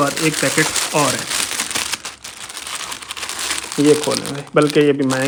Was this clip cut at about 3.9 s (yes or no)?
no